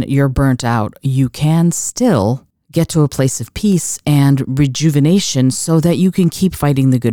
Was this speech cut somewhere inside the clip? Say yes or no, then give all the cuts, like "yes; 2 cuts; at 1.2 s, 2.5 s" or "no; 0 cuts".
no; 0 cuts